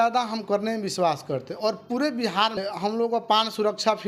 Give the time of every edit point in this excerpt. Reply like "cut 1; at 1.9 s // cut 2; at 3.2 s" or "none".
cut 1; at 2.6 s